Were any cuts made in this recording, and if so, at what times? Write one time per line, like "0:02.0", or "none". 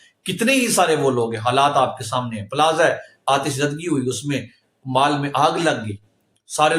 none